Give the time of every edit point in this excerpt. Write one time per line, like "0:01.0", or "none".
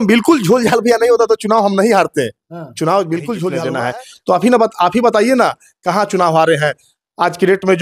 0:03.7